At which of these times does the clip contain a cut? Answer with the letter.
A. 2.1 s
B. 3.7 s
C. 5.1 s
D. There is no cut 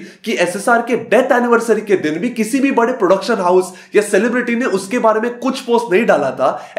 D